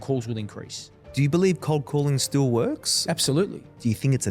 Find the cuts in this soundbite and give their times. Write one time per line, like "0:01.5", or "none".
0:01.0